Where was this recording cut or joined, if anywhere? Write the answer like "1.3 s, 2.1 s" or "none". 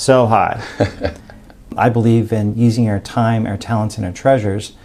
1.7 s